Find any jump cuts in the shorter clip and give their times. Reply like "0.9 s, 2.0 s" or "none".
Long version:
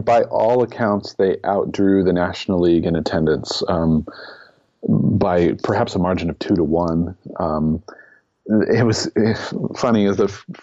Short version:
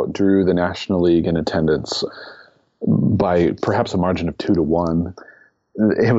2.0 s, 5.2 s

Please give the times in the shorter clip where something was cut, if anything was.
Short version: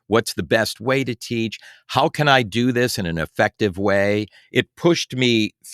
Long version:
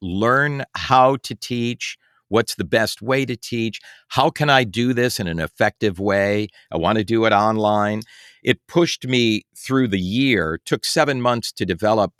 4.4 s

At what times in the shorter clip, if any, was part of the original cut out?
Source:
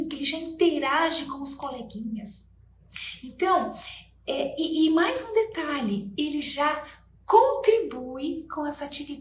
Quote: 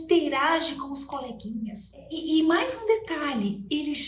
2.1 s

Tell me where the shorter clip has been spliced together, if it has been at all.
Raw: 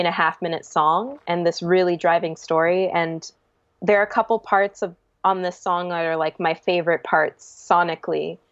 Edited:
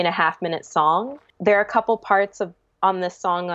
1.2 s

